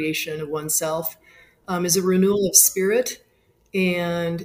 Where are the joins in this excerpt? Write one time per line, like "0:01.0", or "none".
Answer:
none